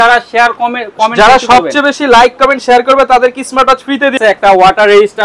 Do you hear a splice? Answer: yes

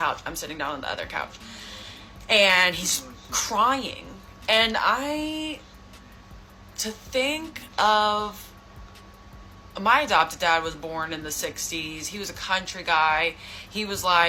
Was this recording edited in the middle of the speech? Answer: no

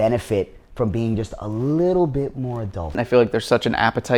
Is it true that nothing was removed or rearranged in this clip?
no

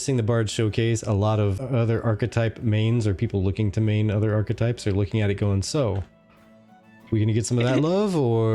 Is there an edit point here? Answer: yes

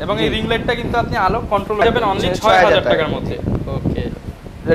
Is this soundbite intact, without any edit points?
no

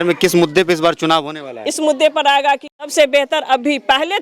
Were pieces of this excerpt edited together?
yes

